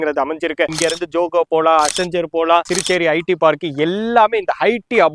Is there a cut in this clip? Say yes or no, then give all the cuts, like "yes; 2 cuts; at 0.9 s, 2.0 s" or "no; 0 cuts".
no; 0 cuts